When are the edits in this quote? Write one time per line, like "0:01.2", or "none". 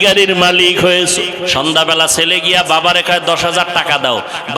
0:01.5